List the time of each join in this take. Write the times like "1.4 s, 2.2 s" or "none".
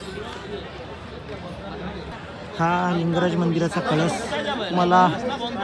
2.1 s